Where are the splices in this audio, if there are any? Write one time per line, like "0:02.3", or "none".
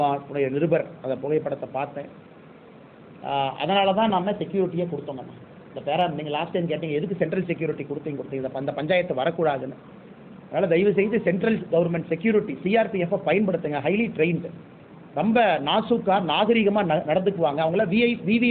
none